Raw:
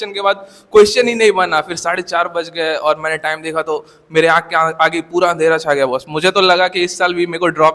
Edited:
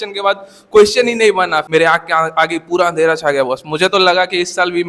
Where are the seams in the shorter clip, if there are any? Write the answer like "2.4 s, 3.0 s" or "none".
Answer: 1.7 s